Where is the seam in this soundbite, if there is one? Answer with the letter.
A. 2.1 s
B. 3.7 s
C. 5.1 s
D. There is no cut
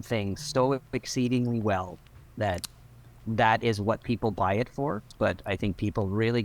C